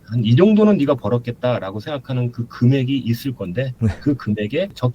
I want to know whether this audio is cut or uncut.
uncut